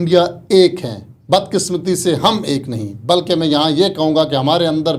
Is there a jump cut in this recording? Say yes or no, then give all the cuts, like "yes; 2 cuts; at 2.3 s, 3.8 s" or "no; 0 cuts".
no; 0 cuts